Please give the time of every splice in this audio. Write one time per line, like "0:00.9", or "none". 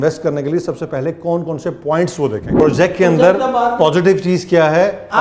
0:02.5

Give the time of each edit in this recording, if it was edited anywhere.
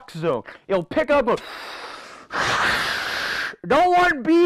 none

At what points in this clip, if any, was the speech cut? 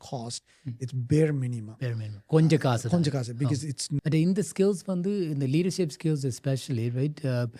0:03.9

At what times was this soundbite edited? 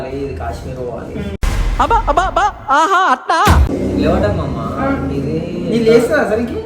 0:03.7

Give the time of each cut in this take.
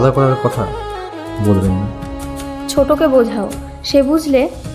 none

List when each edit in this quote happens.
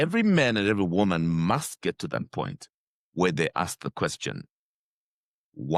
none

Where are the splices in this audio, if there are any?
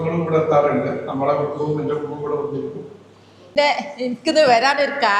0:03.5

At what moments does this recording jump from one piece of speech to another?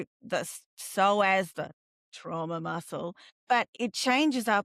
0:03.7

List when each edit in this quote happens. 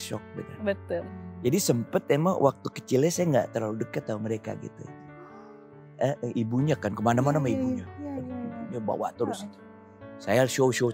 0:01.0

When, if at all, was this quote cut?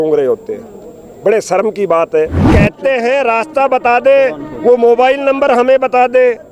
0:02.5

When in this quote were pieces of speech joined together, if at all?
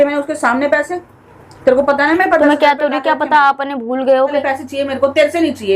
0:04.4

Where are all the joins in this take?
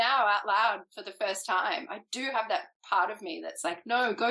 0:02.7

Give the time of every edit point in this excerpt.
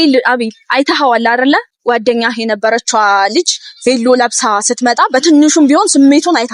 0:01.7

